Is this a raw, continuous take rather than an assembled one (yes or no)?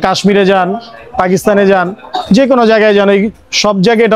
yes